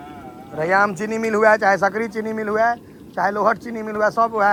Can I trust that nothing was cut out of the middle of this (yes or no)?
yes